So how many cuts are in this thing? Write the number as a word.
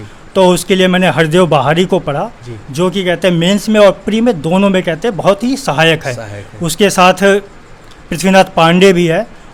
zero